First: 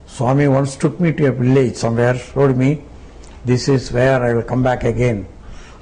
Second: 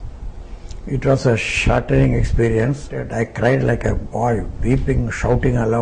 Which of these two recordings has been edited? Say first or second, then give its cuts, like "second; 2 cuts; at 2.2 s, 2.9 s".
second; 1 cut; at 3.1 s